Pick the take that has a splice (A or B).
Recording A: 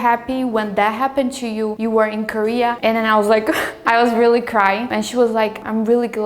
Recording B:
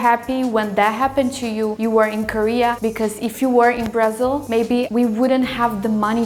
A